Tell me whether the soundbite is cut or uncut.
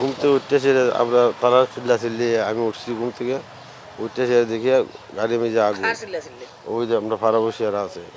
uncut